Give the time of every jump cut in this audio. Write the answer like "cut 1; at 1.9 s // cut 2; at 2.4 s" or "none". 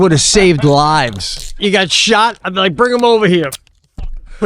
cut 1; at 1.6 s